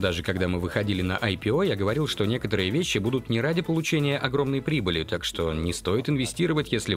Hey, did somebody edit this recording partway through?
no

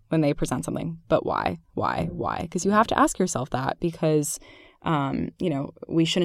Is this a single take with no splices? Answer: yes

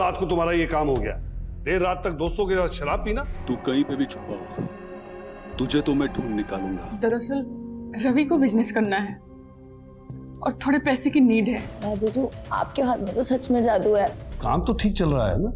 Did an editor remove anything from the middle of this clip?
yes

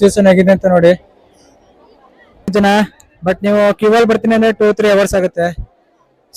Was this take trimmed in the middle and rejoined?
yes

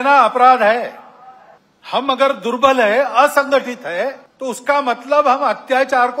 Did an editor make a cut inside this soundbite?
yes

